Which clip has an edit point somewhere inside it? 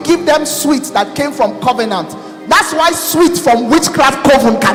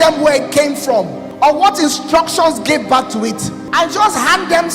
second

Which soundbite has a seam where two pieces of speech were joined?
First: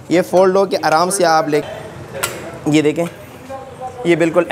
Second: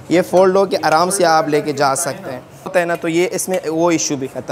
first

